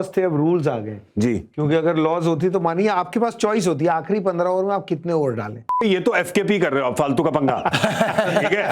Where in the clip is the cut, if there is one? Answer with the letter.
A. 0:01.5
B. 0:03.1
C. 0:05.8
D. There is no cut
C